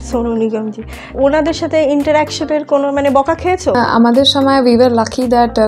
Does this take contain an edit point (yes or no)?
no